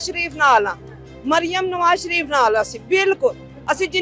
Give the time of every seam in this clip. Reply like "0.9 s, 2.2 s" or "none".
none